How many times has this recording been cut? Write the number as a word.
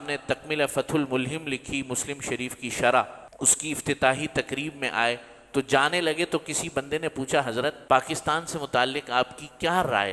two